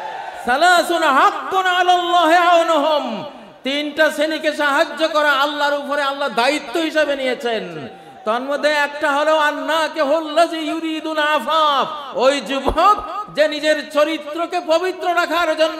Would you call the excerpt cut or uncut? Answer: uncut